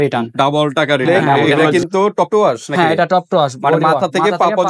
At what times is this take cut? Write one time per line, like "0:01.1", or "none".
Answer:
0:01.6